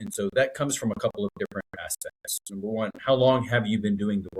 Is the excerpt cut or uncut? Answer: uncut